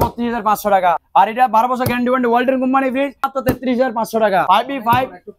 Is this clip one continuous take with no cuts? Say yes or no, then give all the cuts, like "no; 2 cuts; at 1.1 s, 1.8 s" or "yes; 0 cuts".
no; 3 cuts; at 1.0 s, 3.3 s, 4.5 s